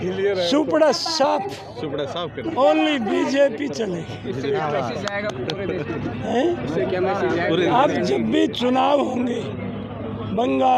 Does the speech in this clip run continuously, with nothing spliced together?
yes; 0 cuts

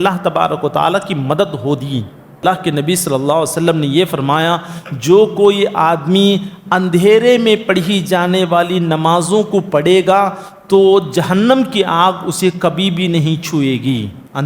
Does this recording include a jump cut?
yes; 1 cut; at 2.4 s

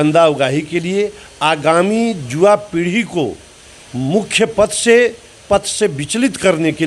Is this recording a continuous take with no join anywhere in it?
yes; 0 cuts

